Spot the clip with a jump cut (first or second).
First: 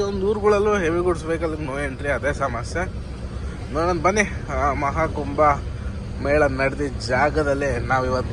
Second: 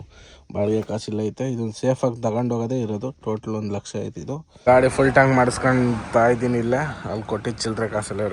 second